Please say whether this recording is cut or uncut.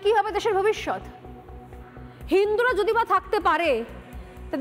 uncut